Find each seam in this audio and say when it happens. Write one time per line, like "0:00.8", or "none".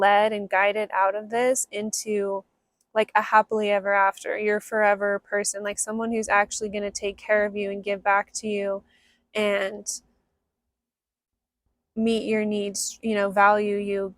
none